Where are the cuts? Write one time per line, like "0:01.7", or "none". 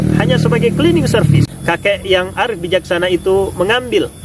0:01.4

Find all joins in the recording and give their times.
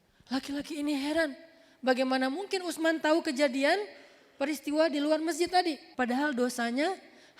0:05.9

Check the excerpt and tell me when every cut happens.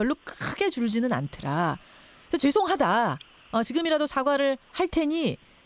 0:01.0

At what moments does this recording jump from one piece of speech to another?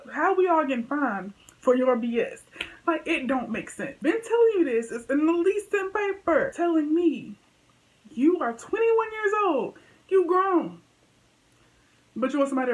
0:04.0
0:06.5

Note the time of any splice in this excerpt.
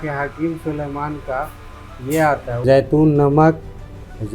0:02.6

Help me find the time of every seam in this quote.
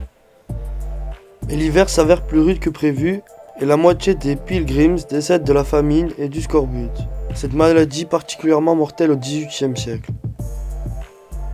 0:01.5

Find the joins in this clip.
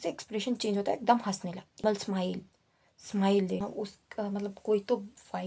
0:01.8
0:03.6

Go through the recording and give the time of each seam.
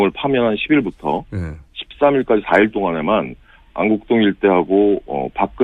none

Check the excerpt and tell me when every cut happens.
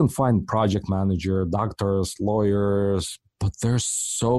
none

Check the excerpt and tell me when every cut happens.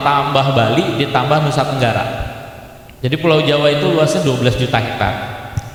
none

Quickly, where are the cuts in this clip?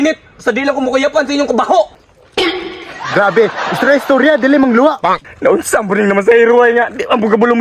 0:05.1

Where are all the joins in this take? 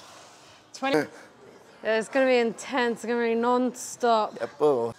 0:00.9

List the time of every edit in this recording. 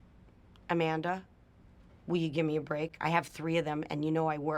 0:02.9

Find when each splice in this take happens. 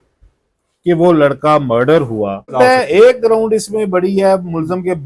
0:02.5

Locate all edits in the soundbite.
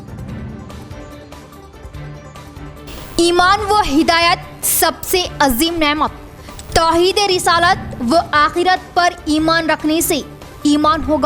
none

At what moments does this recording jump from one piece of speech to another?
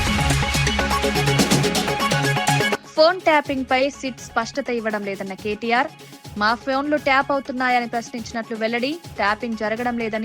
0:02.8

